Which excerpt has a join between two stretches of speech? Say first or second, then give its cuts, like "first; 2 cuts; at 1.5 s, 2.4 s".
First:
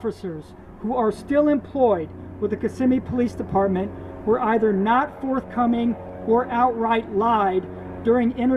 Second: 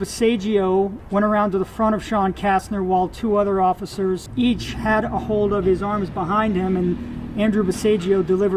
second; 2 cuts; at 1.0 s, 4.3 s